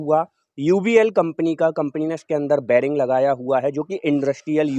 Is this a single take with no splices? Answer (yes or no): yes